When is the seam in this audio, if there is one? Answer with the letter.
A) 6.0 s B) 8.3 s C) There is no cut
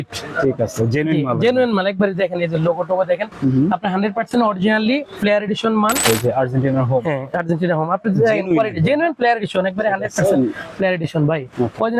A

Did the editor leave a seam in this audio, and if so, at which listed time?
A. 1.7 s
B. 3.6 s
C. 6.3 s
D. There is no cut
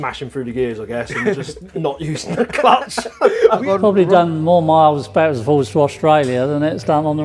B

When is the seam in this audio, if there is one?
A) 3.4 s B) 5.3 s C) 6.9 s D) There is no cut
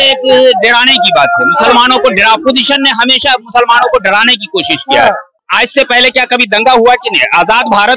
B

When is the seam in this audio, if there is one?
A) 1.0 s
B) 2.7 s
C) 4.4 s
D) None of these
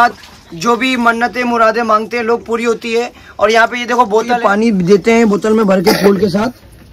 C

